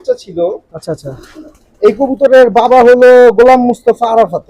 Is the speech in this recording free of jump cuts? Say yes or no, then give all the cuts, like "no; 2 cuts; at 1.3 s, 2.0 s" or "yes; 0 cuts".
yes; 0 cuts